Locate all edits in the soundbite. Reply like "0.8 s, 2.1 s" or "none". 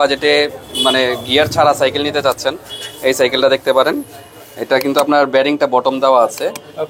none

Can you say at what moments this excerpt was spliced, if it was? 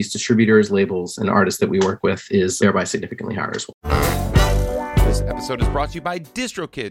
2.5 s, 3.7 s

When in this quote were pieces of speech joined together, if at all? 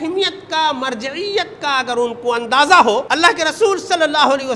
3.1 s

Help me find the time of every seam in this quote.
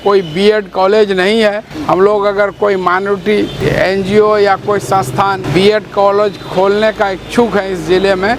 1.7 s, 3.6 s, 5.4 s

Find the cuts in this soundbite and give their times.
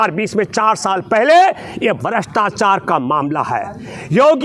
none

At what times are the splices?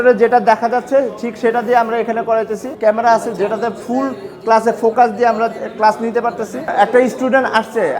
2.7 s, 6.7 s

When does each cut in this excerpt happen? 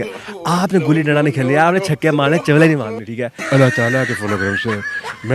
3.4 s

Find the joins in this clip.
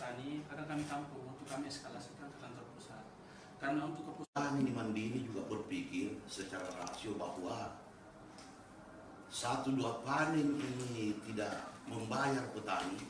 4.2 s

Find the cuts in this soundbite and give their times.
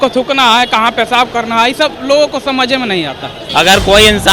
3.3 s

